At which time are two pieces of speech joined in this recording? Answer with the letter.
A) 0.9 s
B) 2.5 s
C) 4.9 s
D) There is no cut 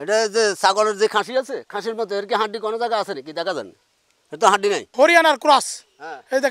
C